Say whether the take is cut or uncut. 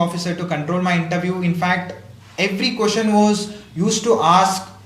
uncut